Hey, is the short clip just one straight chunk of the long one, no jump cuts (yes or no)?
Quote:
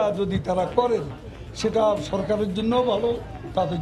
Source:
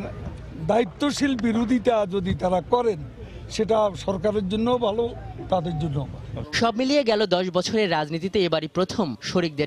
yes